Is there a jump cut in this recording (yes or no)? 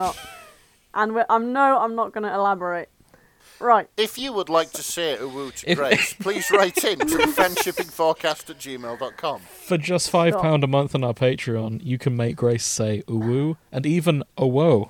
no